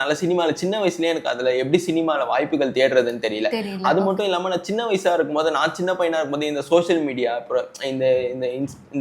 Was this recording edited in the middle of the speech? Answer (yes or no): no